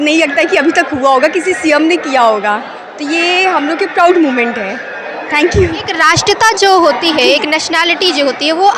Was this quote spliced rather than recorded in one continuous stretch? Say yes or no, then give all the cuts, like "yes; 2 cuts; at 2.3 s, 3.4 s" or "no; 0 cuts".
no; 0 cuts